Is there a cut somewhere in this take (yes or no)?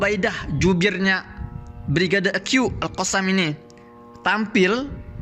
no